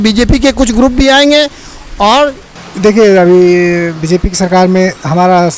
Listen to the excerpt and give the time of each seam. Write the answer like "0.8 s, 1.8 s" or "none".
2.6 s